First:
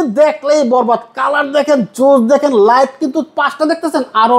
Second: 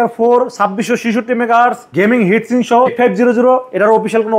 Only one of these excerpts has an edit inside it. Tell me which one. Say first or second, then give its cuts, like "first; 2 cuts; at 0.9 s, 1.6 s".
second; 2 cuts; at 1.8 s, 2.9 s